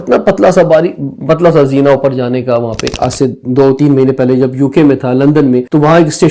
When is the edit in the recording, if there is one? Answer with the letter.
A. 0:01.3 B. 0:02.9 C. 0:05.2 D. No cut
B